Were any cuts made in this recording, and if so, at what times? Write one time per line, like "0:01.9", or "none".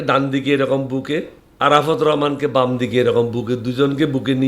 0:01.4